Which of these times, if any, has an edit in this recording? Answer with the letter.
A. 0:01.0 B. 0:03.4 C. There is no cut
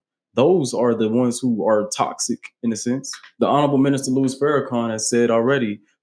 B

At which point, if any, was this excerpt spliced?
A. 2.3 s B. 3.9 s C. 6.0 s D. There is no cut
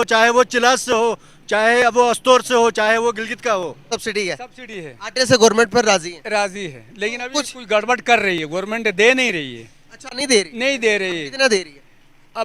B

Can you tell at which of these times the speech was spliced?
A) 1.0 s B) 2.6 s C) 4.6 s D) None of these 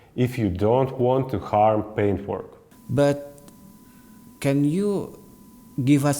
B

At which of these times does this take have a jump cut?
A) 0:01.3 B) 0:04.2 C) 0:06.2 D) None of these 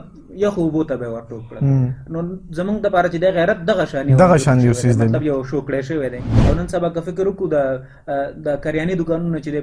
C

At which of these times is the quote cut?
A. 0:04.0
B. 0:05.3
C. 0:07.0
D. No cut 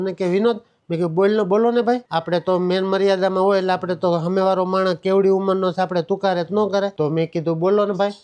D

